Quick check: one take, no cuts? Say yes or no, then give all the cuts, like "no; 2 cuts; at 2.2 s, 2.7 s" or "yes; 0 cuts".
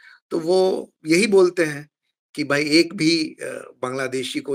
yes; 0 cuts